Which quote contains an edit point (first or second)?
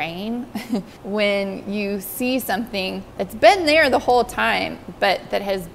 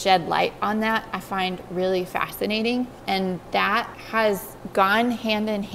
first